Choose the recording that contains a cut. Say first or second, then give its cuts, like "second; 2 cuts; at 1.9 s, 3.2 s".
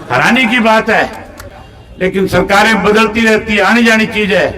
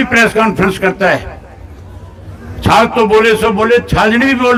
first; 1 cut; at 1.4 s